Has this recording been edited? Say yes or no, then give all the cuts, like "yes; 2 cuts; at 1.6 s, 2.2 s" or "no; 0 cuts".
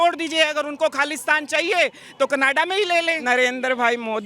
yes; 1 cut; at 3.2 s